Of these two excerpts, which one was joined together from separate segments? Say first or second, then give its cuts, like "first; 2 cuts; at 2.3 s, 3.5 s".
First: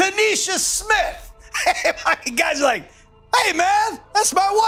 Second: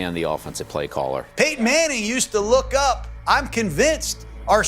second; 1 cut; at 1.3 s